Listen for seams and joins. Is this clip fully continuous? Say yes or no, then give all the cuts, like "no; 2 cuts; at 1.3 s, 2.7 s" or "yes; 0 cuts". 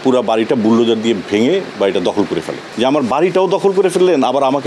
no; 1 cut; at 2.6 s